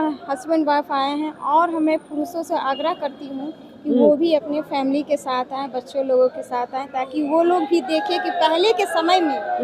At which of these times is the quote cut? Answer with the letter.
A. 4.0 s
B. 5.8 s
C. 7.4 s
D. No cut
D